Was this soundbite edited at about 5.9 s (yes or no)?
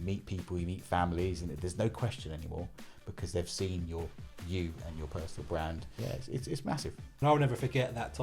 yes